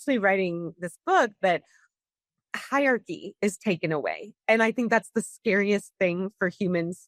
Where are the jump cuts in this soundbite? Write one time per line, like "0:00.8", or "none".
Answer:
none